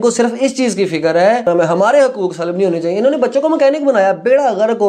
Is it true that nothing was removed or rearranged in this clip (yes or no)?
no